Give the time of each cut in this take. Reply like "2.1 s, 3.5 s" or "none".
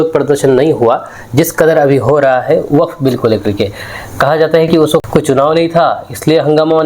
5.0 s